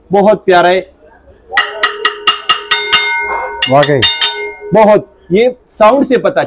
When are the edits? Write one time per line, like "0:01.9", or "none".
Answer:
none